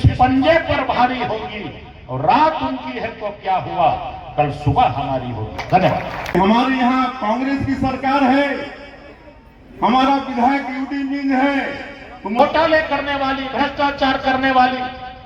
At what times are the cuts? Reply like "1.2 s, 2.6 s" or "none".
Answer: 6.3 s, 12.4 s